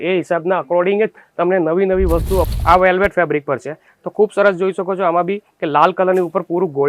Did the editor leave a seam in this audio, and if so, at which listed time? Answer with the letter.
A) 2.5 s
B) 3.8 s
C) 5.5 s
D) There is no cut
A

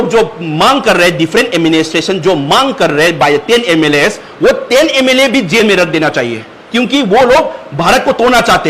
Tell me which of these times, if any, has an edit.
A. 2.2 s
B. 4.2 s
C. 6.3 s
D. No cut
D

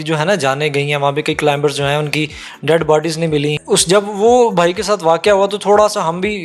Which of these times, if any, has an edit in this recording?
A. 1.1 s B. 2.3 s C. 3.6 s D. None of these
C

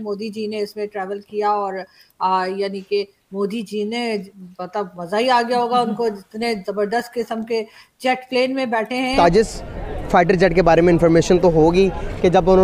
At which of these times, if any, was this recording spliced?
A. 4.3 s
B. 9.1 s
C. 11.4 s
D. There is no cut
B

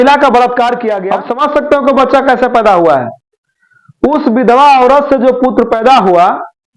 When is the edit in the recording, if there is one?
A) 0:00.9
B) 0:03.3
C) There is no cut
A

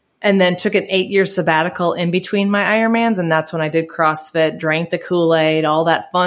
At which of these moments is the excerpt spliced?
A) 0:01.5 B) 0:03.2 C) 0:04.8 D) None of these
D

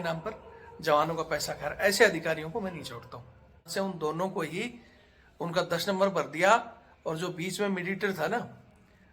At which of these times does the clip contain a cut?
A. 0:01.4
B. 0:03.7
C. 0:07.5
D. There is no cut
B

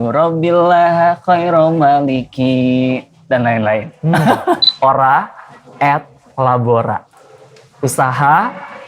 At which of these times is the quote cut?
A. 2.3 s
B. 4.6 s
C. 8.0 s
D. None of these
B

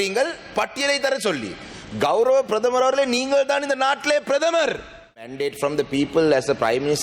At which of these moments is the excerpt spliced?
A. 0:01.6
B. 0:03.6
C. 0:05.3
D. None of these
C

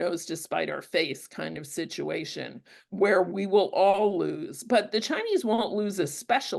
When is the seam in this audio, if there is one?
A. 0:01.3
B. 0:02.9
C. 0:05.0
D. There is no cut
D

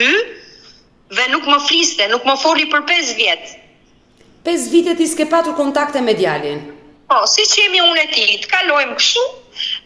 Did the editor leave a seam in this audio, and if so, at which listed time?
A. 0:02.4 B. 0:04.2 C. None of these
C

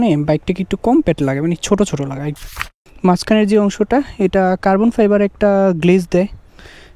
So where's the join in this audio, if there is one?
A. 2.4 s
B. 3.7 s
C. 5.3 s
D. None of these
A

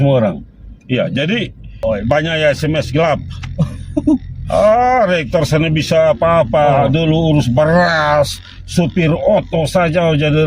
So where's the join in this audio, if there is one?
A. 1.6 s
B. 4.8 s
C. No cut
A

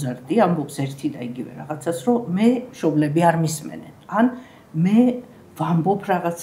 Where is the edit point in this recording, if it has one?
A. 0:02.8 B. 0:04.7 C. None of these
C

